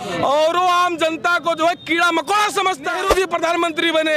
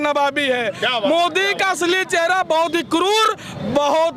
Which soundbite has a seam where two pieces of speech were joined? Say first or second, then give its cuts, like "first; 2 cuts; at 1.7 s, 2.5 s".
first; 1 cut; at 3.0 s